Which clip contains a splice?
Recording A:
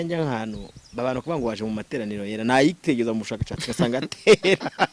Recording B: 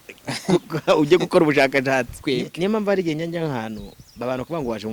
B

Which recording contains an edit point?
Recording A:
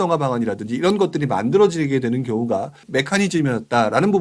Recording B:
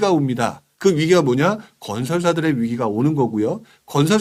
A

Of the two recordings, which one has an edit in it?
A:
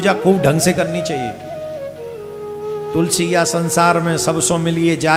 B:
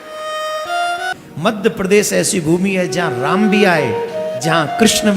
B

